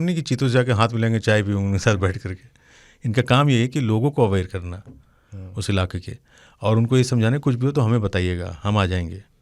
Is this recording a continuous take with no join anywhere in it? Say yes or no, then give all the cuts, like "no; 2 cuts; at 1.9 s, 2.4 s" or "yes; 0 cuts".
yes; 0 cuts